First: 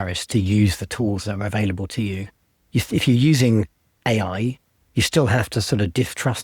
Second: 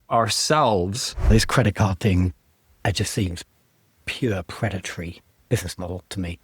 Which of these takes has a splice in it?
second; 2 cuts; at 1.3 s, 5.3 s

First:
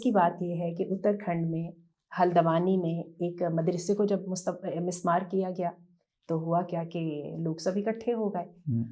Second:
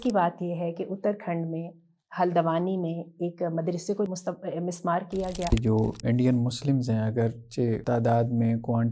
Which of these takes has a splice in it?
second; 3 cuts; at 4.1 s, 5.5 s, 7.8 s

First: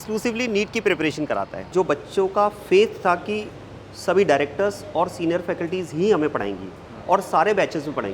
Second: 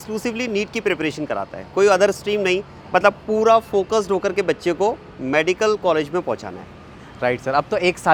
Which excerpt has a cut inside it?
first; 1 cut; at 1.6 s

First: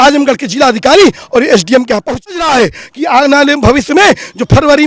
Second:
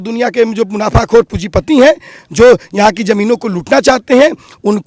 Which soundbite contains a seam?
first; 1 cut; at 2.1 s

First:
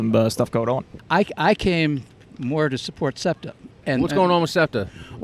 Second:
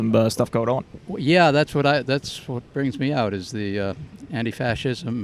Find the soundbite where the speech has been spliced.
first; 2 cuts; at 0.9 s, 3.8 s

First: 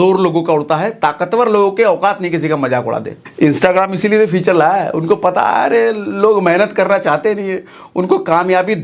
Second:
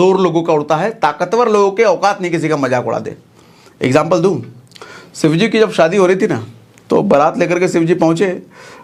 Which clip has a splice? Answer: first; 1 cut; at 3.2 s

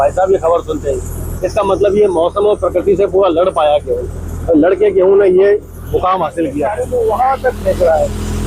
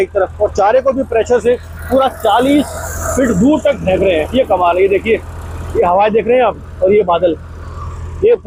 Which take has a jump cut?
first; 2 cuts; at 1.3 s, 6.7 s

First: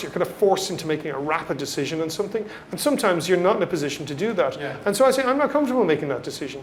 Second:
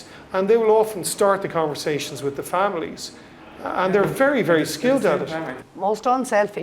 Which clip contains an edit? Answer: second; 1 cut; at 5.6 s

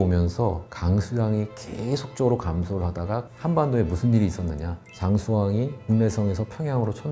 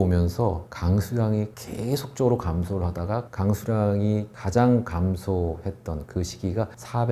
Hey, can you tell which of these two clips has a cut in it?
first; 1 cut; at 3.3 s

